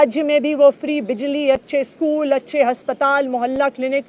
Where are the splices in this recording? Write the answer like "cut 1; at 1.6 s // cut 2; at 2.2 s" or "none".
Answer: none